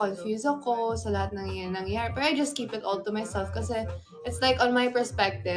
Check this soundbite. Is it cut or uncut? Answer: uncut